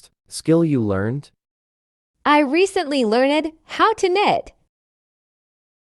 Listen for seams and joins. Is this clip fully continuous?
yes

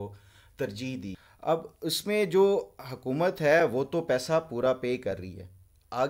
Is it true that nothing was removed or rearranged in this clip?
no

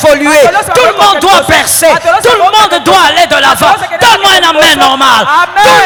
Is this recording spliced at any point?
no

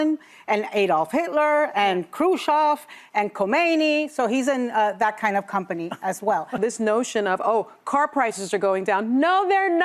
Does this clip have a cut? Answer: yes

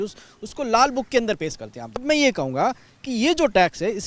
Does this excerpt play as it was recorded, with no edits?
no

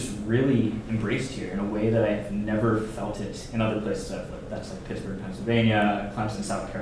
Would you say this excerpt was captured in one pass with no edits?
yes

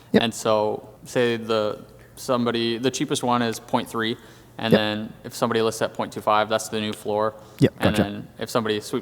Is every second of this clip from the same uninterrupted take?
no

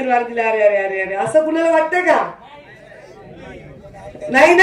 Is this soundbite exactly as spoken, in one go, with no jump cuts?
yes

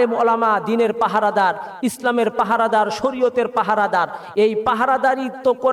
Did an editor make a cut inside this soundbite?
no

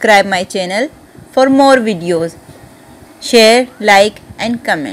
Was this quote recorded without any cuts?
yes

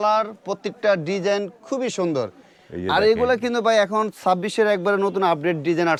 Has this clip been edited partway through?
no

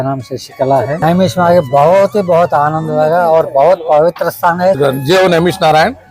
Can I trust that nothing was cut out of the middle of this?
no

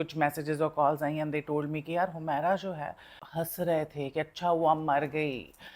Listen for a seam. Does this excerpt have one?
yes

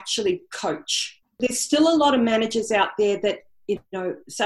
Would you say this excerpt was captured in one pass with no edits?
no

